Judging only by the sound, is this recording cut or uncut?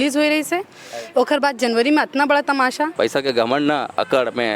cut